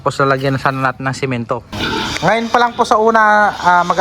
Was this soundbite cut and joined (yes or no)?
yes